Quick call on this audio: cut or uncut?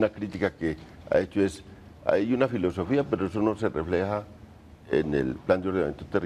uncut